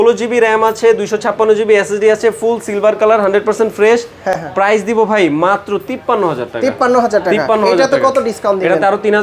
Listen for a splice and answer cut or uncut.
uncut